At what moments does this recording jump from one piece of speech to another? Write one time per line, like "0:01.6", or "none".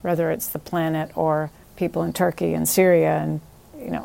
0:01.6